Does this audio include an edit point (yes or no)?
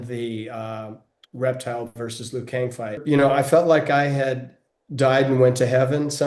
yes